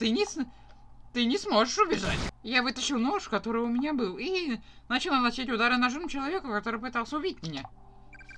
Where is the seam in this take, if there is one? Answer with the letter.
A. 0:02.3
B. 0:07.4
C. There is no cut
A